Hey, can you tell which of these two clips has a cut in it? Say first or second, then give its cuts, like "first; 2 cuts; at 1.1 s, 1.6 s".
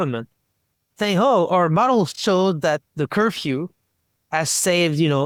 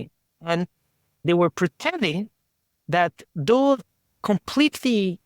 second; 1 cut; at 1.2 s